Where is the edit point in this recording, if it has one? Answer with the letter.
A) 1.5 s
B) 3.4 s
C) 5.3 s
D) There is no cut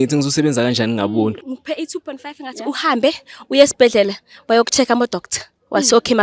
A